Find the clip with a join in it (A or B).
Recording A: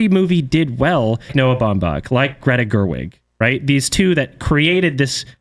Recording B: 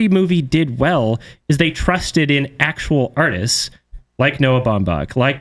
A